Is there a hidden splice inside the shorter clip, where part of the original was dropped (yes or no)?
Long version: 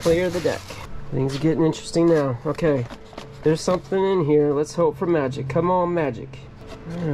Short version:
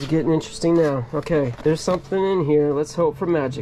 yes